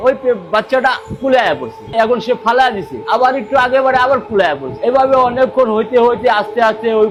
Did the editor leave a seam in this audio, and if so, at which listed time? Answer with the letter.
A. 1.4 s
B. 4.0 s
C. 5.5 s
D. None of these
D